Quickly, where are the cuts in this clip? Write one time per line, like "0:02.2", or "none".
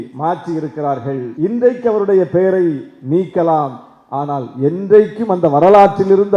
0:01.3